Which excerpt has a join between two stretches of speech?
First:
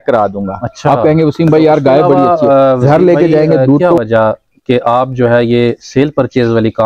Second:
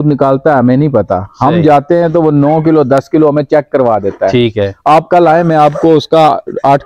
first; 1 cut; at 3.9 s

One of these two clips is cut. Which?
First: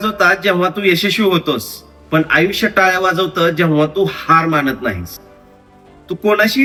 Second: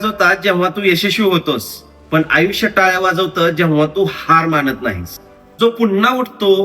second; 1 cut; at 5.6 s

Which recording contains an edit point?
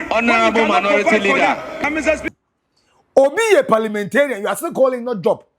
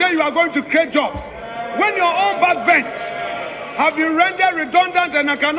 first; 1 cut; at 2.2 s

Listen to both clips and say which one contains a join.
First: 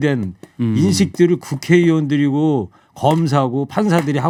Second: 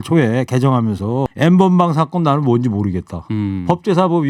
second; 1 cut; at 1.3 s

